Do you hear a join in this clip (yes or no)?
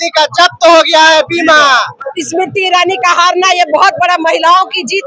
yes